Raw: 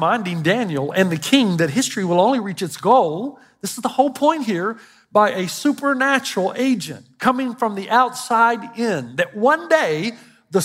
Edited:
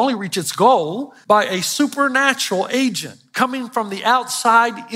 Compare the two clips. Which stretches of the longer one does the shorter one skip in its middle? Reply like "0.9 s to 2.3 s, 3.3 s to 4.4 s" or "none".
3.3 s to 4.9 s